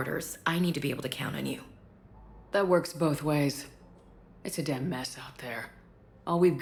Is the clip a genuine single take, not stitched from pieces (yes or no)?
yes